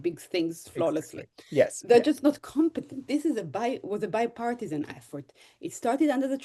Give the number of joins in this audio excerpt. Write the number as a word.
one